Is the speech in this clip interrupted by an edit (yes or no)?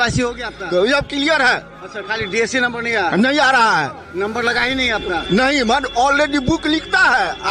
no